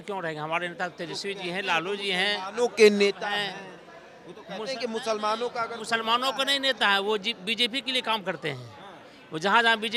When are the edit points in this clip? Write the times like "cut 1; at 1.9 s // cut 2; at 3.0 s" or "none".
none

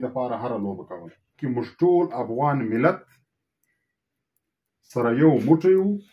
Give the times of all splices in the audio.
cut 1; at 1.4 s

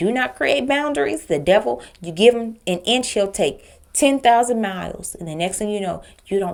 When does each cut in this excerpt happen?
none

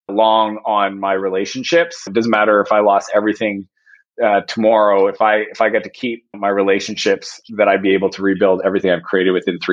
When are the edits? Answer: cut 1; at 2.1 s // cut 2; at 6.3 s

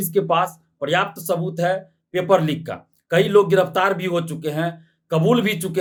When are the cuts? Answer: none

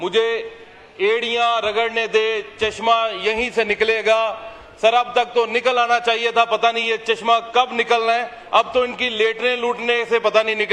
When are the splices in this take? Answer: none

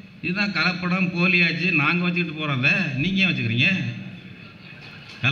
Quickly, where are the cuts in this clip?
none

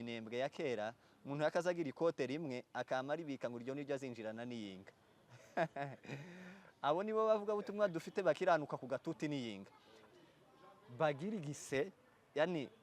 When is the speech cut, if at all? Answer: cut 1; at 9.9 s

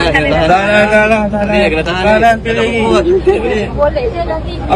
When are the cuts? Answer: none

